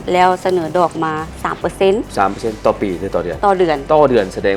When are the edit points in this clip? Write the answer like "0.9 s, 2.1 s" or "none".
none